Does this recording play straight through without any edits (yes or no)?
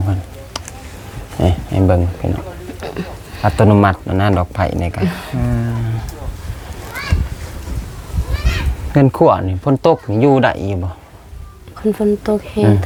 yes